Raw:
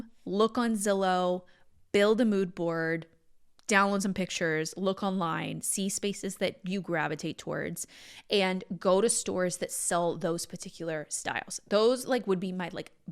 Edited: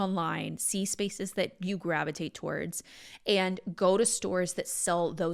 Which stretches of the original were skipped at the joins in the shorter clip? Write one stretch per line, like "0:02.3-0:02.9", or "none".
none